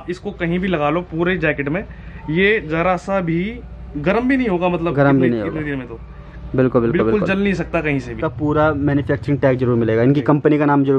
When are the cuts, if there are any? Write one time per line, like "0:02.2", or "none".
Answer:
0:08.3